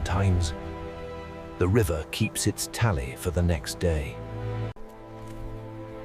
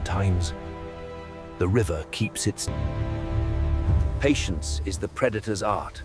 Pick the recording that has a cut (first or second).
second